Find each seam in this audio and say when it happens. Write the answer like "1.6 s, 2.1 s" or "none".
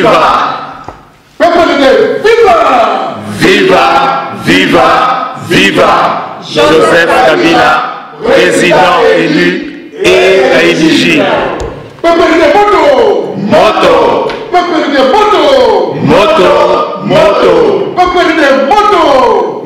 none